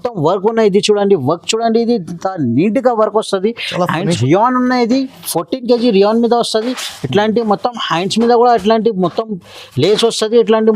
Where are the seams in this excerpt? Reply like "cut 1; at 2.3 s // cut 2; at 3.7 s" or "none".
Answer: cut 1; at 4.2 s